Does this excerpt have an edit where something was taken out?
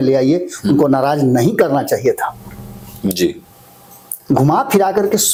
no; 0 cuts

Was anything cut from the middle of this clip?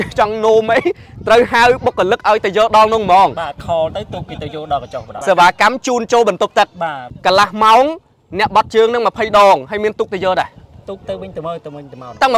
yes; 2 cuts; at 5.1 s, 7.1 s

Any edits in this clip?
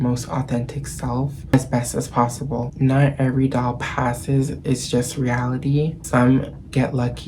yes; 3 cuts; at 1.5 s, 2.7 s, 6.0 s

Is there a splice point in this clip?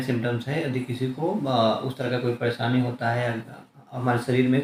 no; 0 cuts

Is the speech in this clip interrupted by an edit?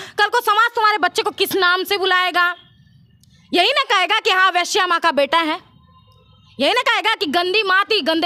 no; 0 cuts

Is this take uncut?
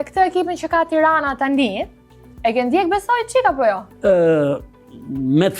yes; 0 cuts

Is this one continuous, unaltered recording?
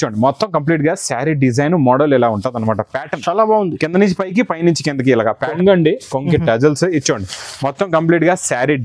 no; 1 cut; at 5.5 s

